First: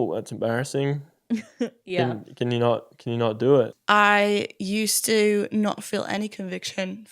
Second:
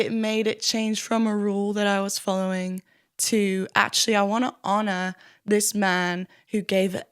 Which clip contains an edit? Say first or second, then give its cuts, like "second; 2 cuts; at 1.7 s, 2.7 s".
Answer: first; 1 cut; at 3.8 s